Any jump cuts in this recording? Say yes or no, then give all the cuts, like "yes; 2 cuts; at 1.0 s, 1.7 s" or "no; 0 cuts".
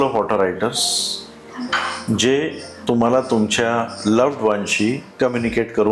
no; 0 cuts